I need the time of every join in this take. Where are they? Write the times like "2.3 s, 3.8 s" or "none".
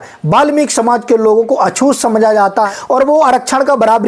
2.7 s